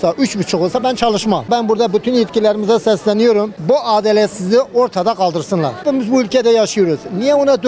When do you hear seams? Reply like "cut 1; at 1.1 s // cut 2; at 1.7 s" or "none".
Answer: cut 1; at 1.5 s // cut 2; at 3.5 s // cut 3; at 5.8 s